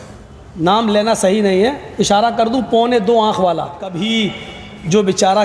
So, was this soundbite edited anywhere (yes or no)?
yes